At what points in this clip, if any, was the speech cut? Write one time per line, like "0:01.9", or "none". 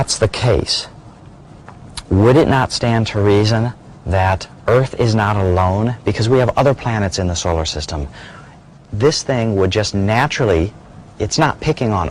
0:02.1